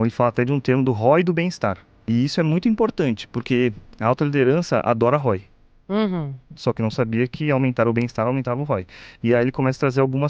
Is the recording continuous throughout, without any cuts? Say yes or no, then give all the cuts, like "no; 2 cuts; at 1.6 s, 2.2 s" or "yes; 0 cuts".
no; 1 cut; at 1.9 s